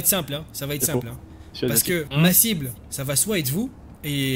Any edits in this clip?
no; 0 cuts

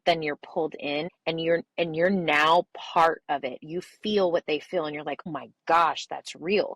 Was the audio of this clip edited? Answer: yes; 2 cuts; at 1.1 s, 5.3 s

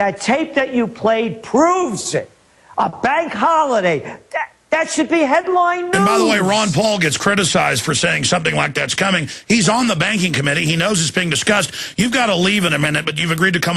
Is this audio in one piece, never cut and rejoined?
no; 1 cut; at 4.0 s

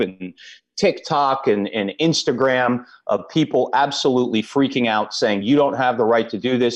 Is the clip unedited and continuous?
yes; 0 cuts

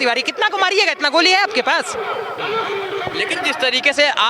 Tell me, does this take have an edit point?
no; 0 cuts

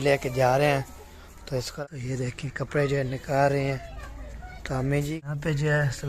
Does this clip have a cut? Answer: yes; 2 cuts; at 1.7 s, 5.1 s

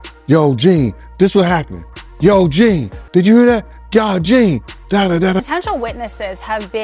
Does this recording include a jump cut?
yes; 1 cut; at 5.4 s

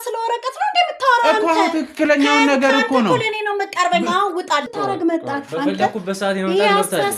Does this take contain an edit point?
yes; 1 cut; at 4.7 s

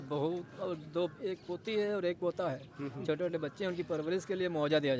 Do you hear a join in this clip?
no; 0 cuts

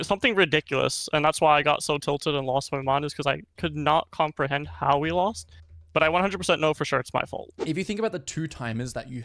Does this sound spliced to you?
yes; 1 cut; at 7.5 s

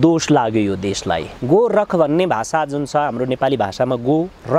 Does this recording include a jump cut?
yes; 1 cut; at 1.3 s

